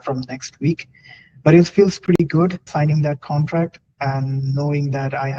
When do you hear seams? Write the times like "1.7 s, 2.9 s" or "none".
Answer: 2.7 s

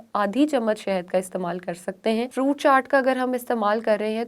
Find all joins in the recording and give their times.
2.3 s

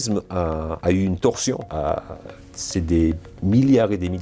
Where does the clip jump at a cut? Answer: none

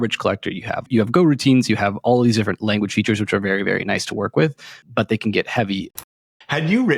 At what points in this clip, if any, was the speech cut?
0.9 s, 4.7 s, 6.0 s

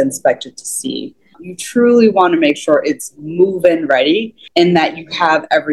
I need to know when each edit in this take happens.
1.4 s, 4.4 s

